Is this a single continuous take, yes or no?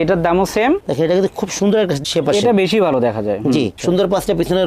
no